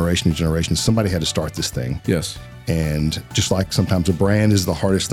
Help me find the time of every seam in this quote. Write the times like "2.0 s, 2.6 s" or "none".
none